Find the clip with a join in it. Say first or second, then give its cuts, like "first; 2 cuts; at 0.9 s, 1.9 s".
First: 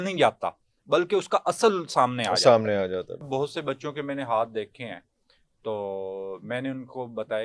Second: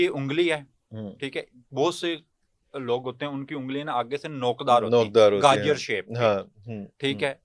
first; 1 cut; at 3.2 s